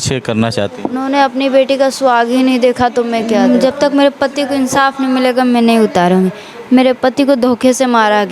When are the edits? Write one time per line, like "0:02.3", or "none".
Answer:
0:03.4